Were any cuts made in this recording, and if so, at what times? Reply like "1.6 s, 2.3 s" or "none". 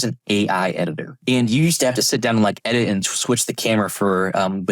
1.1 s